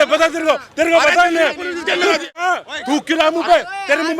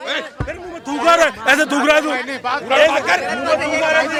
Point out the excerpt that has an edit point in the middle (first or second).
first